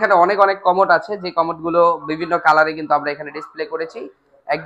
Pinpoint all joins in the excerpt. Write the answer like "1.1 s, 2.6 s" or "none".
none